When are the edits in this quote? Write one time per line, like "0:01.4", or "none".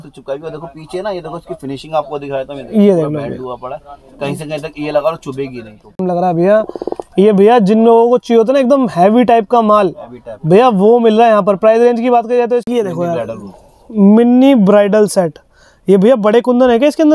0:06.0
0:12.7